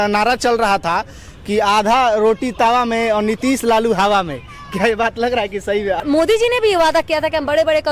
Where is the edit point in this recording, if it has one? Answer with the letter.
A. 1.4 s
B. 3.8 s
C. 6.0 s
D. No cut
C